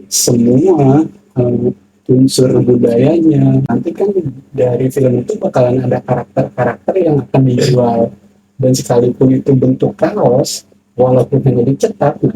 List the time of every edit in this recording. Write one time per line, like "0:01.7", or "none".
0:03.7